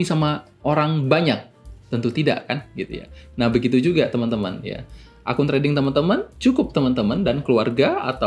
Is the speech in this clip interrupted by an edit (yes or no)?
no